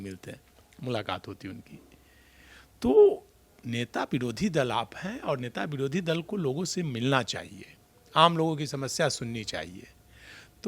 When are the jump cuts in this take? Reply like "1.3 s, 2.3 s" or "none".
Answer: none